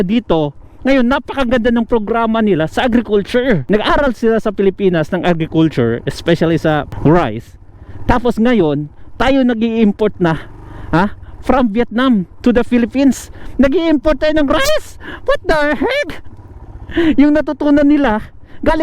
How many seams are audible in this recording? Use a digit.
2